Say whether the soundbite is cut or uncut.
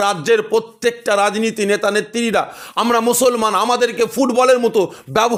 uncut